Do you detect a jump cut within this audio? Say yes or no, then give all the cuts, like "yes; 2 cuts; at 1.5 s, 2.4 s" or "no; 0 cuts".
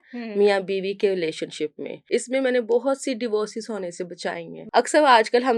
yes; 2 cuts; at 1.9 s, 4.6 s